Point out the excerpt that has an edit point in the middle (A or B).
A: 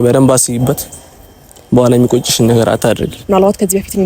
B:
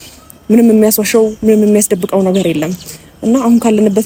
A